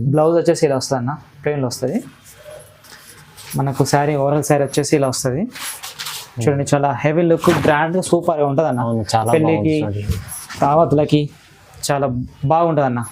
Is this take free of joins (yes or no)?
yes